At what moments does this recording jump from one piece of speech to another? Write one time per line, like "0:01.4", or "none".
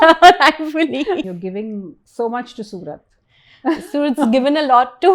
0:01.3